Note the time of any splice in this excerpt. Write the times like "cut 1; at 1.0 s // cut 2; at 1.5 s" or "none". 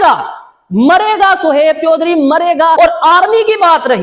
cut 1; at 2.8 s